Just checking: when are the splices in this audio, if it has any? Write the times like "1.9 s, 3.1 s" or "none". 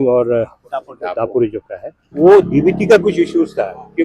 2.1 s